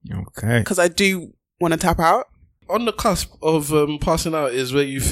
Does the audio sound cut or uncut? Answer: cut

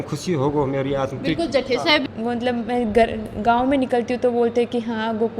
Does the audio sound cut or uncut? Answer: cut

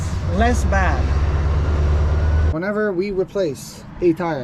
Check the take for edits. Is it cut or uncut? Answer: cut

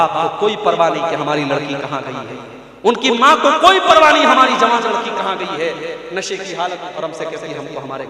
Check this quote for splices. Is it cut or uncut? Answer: cut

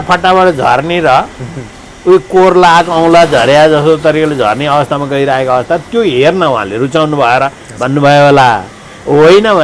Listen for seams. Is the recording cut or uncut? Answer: uncut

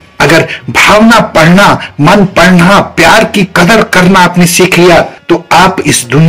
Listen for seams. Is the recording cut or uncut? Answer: cut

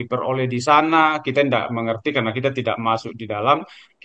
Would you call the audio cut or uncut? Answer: uncut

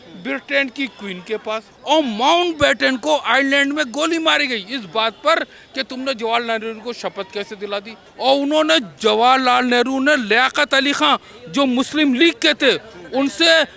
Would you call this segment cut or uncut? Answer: cut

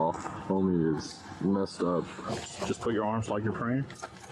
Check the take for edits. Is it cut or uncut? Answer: cut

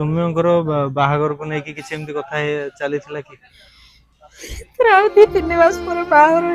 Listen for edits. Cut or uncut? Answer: uncut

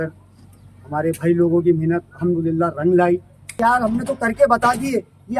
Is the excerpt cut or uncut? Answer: cut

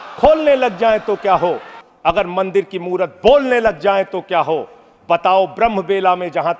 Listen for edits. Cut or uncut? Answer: uncut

